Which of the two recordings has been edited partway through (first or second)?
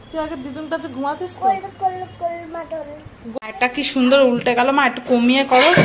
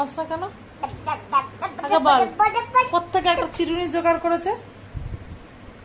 first